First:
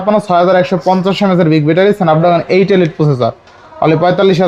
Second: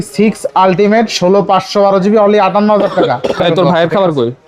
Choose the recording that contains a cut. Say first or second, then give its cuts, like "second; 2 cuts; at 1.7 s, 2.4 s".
second; 1 cut; at 3.4 s